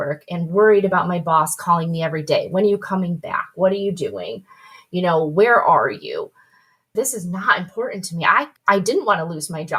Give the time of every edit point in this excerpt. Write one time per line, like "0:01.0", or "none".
none